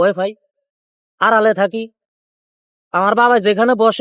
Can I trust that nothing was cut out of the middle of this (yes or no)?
yes